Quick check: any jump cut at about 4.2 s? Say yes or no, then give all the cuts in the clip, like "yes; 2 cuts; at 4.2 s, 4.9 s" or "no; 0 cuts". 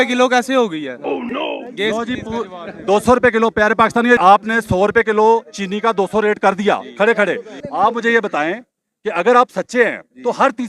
yes; 2 cuts; at 4.2 s, 7.5 s